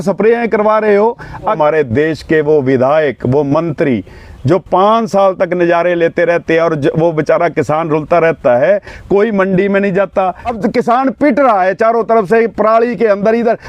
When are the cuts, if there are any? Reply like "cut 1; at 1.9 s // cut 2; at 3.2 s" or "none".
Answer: cut 1; at 1.6 s // cut 2; at 10.5 s